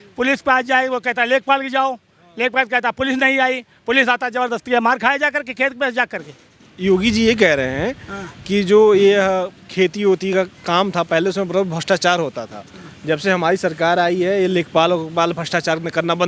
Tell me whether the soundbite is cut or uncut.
cut